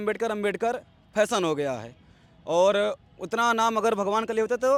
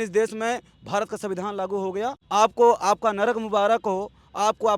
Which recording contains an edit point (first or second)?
second